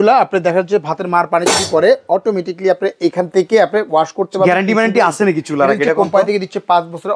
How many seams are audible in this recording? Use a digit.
0